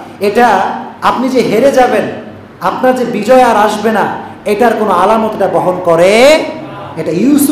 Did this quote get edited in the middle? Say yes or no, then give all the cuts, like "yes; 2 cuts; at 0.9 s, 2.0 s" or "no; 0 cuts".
no; 0 cuts